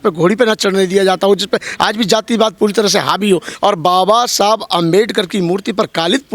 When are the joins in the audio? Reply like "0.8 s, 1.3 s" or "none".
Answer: 3.5 s

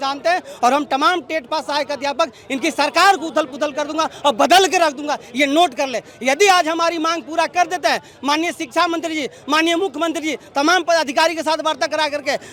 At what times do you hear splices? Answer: none

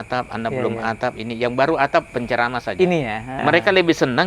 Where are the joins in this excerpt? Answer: 2.1 s, 3.4 s

